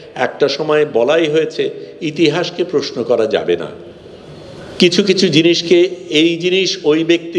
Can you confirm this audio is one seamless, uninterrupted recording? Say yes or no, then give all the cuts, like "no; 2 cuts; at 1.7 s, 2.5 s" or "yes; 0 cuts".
yes; 0 cuts